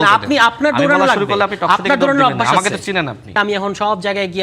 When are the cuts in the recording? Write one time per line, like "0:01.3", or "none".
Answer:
0:03.4